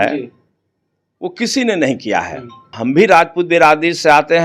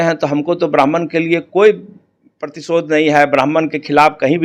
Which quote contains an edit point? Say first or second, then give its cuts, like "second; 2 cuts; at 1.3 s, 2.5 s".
first; 1 cut; at 2.7 s